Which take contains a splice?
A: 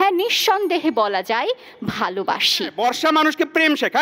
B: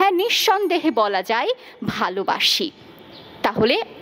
A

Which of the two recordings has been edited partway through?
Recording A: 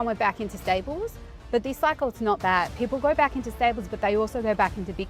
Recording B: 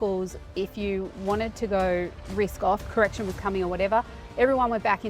B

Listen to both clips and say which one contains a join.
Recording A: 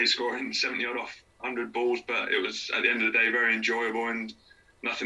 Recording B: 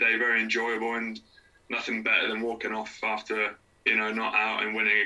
B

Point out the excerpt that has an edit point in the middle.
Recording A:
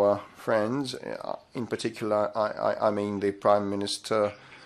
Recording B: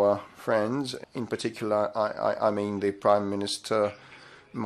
B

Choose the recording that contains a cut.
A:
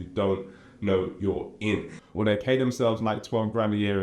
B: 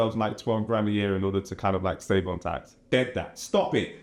A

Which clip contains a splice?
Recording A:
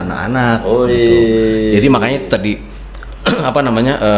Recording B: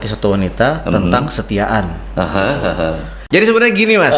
B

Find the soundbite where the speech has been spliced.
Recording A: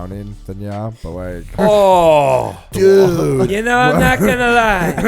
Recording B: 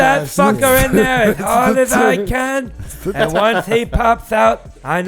A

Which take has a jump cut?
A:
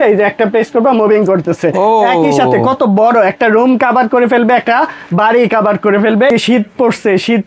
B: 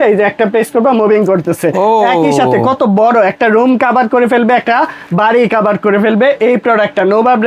A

